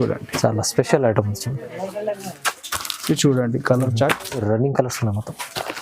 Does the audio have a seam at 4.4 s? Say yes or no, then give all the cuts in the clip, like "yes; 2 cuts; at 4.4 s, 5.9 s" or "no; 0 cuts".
yes; 1 cut; at 4.4 s